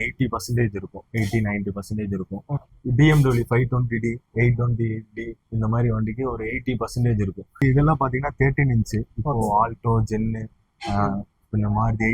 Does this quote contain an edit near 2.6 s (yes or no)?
yes